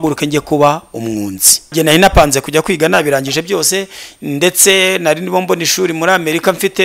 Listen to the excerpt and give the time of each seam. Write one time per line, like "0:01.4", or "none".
0:01.7